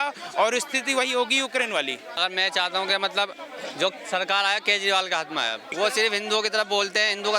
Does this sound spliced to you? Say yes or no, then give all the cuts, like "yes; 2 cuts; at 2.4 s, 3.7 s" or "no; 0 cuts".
yes; 2 cuts; at 2.2 s, 5.6 s